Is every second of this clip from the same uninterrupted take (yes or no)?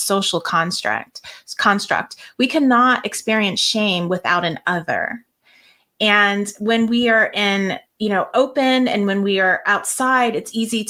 yes